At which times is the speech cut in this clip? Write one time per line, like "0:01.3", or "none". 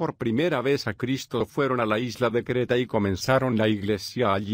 none